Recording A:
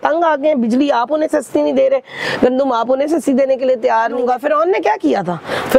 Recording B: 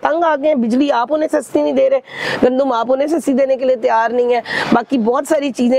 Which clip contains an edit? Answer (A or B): A